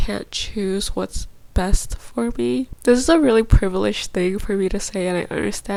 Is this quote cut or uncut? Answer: uncut